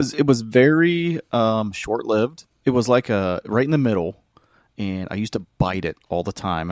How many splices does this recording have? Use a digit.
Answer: 1